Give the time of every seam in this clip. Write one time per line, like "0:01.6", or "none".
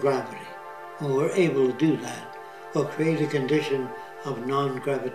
0:01.1